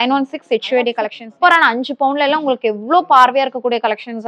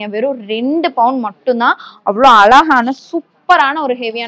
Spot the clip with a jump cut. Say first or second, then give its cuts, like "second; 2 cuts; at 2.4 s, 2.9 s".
first; 1 cut; at 0.9 s